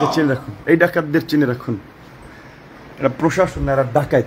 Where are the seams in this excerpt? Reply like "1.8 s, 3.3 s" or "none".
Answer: none